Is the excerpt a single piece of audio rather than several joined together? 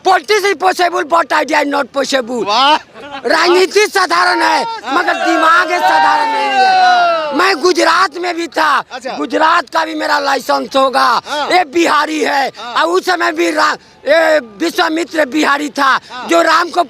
yes; 0 cuts

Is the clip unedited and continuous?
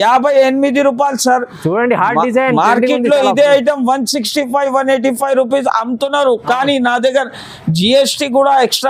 yes; 0 cuts

